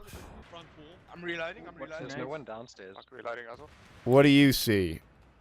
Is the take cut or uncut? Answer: cut